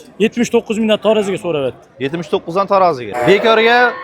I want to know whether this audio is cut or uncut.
cut